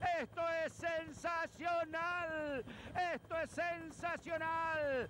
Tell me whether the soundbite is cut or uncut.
uncut